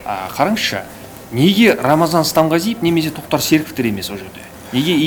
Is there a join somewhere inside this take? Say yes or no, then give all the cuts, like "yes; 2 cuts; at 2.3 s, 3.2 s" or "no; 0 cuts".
no; 0 cuts